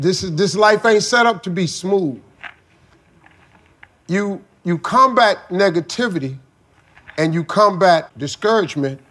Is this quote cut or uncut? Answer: cut